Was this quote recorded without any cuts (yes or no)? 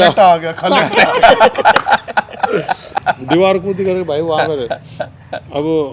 no